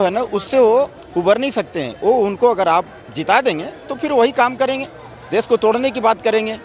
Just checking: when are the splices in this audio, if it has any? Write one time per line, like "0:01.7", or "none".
none